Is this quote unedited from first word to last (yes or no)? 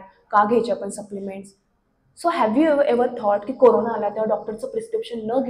yes